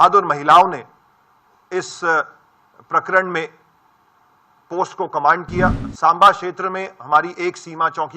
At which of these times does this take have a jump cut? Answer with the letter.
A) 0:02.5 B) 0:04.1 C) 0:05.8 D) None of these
C